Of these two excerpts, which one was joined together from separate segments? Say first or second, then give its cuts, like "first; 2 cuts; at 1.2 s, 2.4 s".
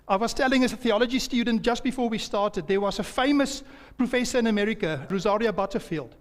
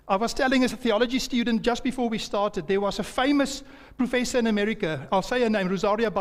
first; 1 cut; at 5.1 s